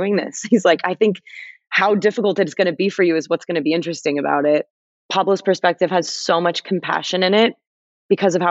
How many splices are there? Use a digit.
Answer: 1